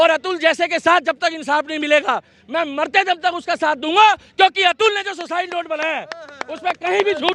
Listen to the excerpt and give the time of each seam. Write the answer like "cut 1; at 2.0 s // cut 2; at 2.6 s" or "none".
none